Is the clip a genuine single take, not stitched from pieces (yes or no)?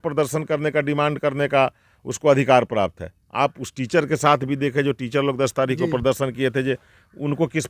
yes